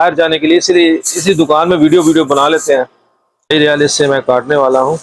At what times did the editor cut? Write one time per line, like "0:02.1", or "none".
0:03.5